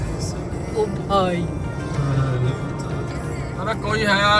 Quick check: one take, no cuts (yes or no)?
yes